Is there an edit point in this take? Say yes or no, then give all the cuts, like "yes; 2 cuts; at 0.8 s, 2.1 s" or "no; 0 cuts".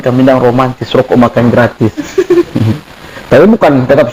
no; 0 cuts